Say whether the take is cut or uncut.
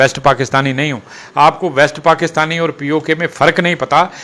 uncut